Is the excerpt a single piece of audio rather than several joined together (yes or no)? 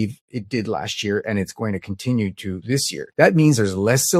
yes